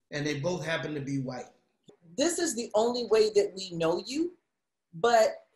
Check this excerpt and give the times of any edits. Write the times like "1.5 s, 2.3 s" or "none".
1.9 s

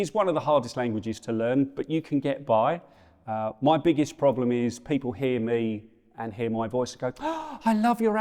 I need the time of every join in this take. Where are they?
none

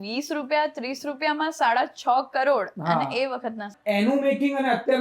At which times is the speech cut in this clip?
3.7 s

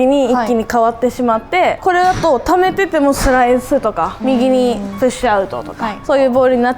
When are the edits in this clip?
1.8 s, 4.2 s, 5.9 s

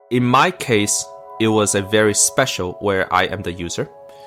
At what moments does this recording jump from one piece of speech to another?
none

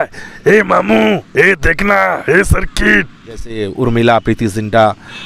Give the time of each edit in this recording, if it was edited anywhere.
3.7 s

